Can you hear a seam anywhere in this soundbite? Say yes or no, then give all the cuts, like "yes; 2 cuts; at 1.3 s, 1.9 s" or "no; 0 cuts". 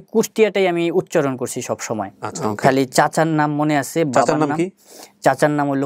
yes; 1 cut; at 2.2 s